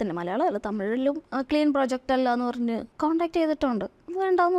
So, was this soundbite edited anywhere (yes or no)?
yes